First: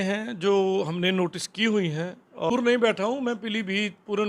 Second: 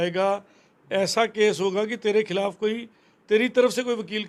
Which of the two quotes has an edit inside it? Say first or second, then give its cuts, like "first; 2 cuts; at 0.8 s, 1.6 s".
first; 1 cut; at 2.5 s